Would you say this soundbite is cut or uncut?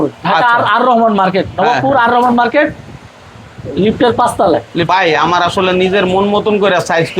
cut